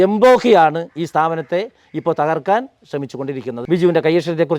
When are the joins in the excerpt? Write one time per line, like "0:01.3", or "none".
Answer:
0:03.5

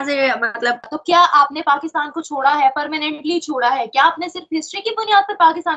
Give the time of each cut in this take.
0:00.9

